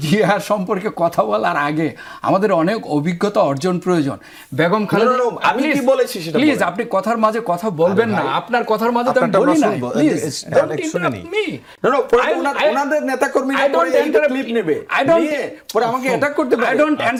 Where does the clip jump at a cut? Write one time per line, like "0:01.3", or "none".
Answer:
none